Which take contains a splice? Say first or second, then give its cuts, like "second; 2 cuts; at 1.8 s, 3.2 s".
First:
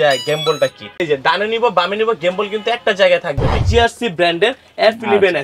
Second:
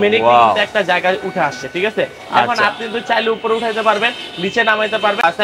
first; 2 cuts; at 1.0 s, 3.6 s